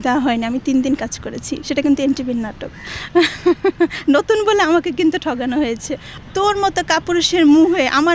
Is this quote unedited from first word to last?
no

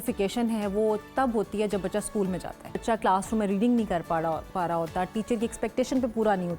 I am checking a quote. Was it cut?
yes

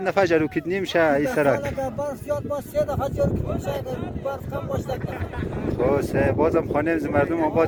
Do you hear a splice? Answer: no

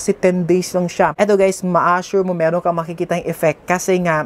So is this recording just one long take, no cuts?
no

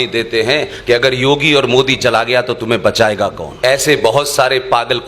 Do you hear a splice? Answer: yes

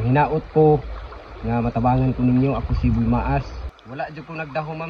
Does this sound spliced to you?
yes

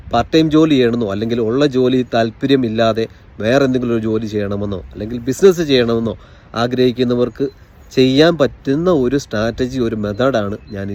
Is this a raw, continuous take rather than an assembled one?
yes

